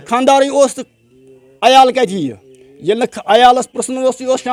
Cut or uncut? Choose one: uncut